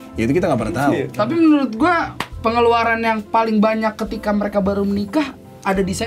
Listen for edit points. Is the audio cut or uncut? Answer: cut